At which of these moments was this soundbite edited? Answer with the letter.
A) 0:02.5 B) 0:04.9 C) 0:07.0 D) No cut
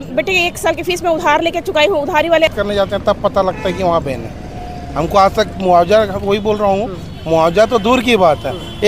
A